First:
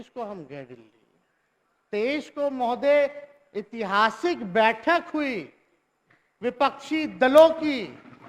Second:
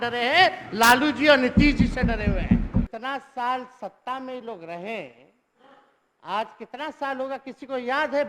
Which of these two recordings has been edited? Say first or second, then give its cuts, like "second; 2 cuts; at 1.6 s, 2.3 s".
second; 1 cut; at 2.9 s